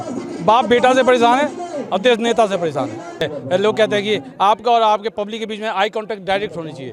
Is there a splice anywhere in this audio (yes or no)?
yes